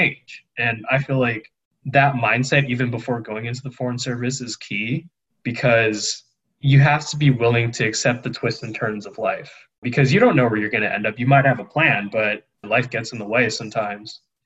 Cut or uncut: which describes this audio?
cut